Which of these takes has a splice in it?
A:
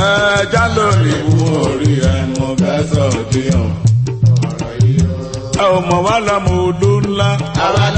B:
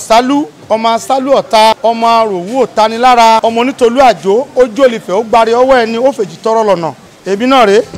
B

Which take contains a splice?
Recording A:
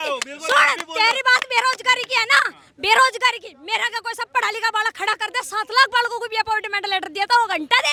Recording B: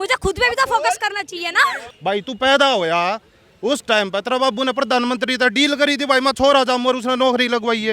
B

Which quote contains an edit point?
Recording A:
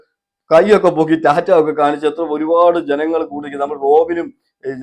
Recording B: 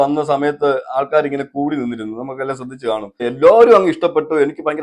B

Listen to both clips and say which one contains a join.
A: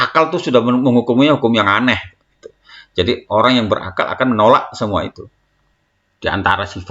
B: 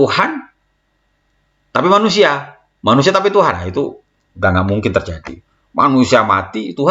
A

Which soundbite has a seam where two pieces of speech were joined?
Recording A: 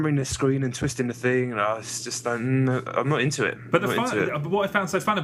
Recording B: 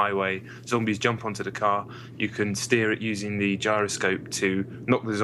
A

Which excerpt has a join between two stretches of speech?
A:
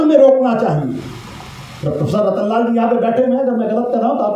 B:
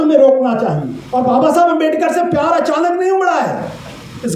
B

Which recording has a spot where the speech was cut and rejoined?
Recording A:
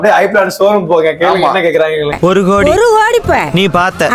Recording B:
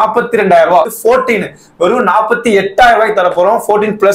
B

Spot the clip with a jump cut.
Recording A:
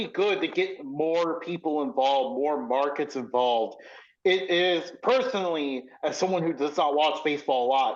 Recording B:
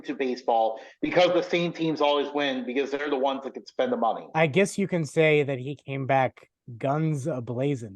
B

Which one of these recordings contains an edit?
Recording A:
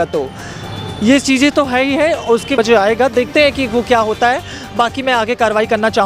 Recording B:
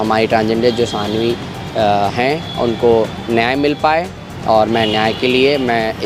A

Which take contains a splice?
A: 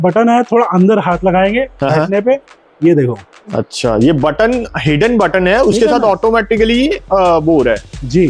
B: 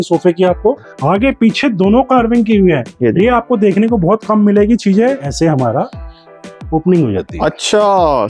B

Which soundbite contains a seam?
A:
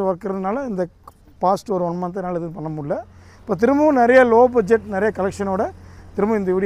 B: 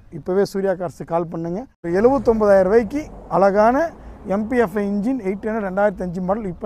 B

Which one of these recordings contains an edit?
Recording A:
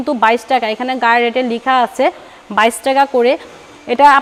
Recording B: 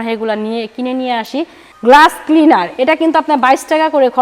B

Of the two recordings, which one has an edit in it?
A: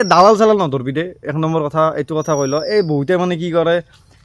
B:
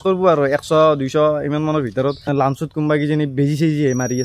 B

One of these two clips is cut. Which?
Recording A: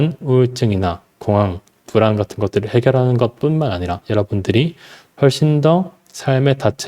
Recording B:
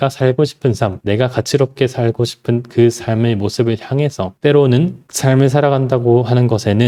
A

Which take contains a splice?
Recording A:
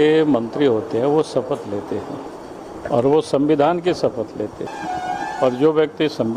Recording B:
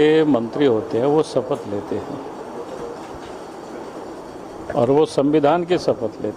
A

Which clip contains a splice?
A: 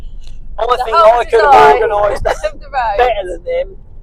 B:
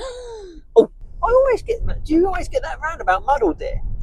B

